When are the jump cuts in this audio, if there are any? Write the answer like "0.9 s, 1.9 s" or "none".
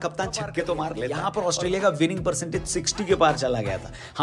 1.1 s